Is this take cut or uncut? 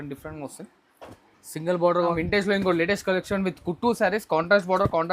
cut